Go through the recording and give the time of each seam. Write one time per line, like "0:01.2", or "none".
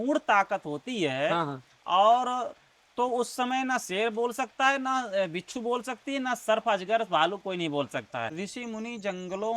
0:08.3